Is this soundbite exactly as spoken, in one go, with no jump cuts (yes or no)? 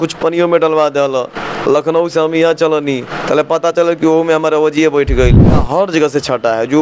no